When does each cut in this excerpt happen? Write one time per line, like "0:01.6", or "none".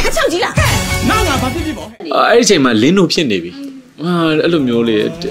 0:02.0